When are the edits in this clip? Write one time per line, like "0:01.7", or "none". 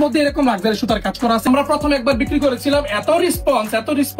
0:01.5